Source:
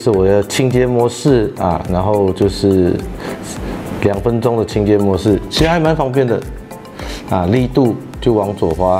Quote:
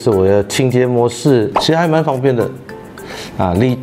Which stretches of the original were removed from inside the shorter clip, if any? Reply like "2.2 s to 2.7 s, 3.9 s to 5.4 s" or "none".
1.6 s to 5.5 s